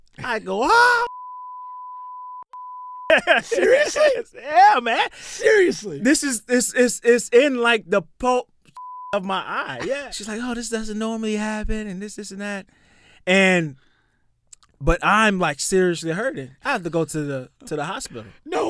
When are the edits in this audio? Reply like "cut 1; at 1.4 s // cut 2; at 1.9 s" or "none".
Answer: cut 1; at 10.1 s